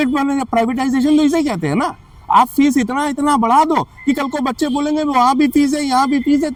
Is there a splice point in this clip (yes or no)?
no